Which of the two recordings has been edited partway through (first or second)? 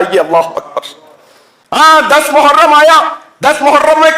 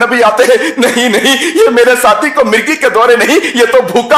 first